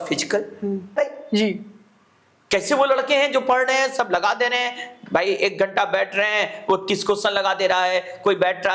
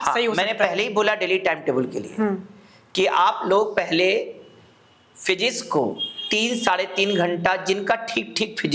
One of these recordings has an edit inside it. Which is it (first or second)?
first